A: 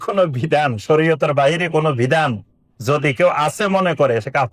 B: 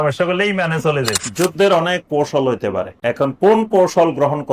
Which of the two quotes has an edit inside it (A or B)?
B